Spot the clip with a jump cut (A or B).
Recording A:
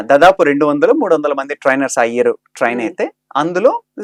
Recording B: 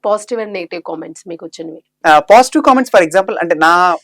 B